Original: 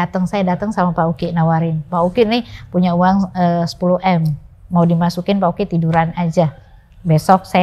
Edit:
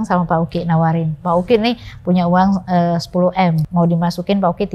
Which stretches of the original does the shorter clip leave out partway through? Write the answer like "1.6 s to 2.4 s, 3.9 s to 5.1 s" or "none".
4.3 s to 4.6 s